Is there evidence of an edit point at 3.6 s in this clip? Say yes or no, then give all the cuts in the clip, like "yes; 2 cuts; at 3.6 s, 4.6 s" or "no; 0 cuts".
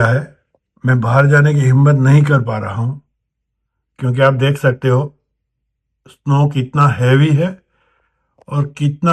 no; 0 cuts